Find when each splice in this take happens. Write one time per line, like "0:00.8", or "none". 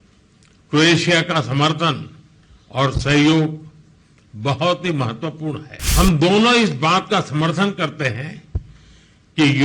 0:05.7